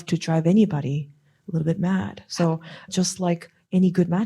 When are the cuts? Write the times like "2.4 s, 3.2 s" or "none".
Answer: 1.2 s, 2.9 s